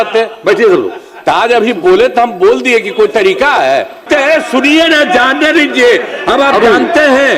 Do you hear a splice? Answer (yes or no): yes